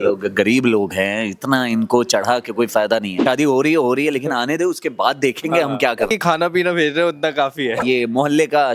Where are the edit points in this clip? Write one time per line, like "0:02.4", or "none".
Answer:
0:03.2
0:06.1
0:07.8